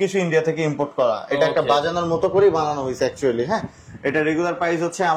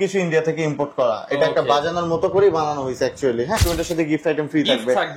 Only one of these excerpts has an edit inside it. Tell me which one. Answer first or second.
second